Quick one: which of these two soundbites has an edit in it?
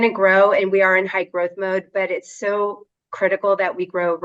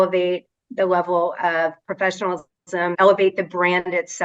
second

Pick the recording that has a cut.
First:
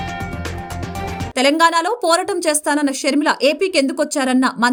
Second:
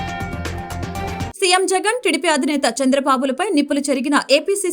second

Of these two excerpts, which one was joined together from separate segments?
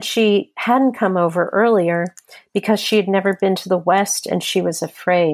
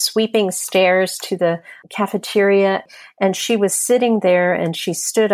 second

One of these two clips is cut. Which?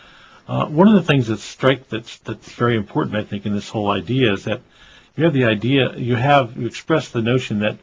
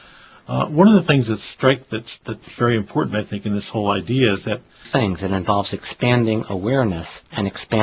first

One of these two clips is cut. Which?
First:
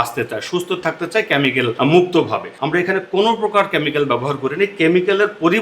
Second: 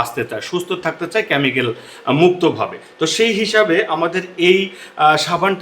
first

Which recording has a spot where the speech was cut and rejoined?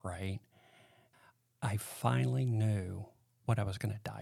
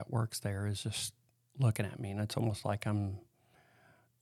first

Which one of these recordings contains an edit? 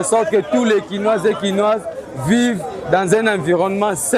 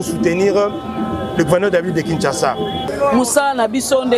second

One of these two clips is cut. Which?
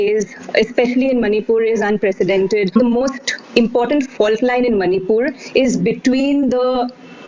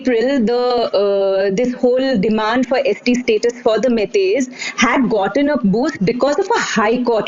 first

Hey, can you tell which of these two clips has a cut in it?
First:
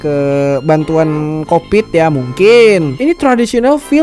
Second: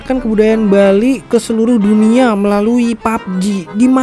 first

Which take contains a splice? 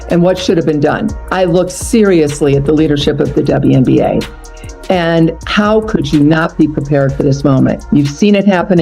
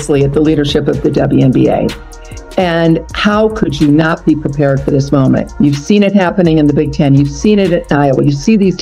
first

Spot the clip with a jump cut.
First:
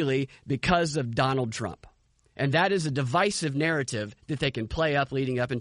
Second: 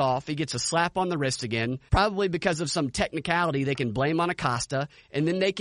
second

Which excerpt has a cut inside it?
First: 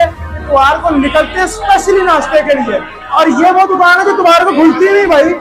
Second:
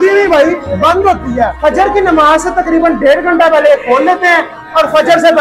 second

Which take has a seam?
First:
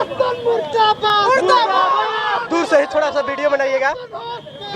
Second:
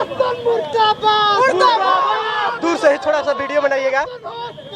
first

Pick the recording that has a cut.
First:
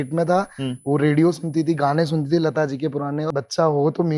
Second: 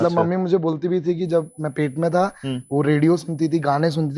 first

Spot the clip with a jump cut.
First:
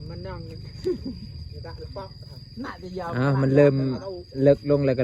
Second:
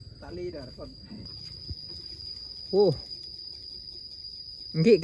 second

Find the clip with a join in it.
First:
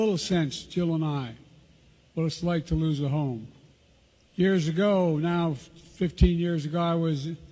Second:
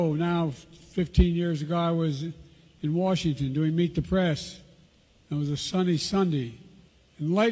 first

